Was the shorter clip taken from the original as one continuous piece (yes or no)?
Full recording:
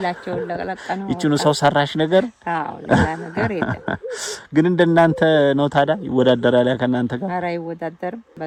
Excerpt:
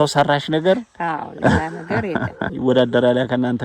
no